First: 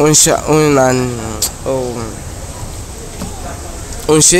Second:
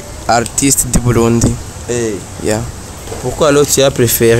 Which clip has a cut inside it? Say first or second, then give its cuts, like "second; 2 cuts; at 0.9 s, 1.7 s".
second; 1 cut; at 2.9 s